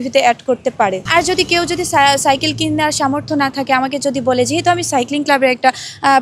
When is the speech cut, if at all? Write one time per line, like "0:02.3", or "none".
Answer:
0:01.0